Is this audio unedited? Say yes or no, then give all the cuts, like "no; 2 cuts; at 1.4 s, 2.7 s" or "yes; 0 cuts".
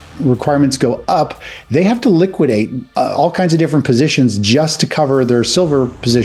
yes; 0 cuts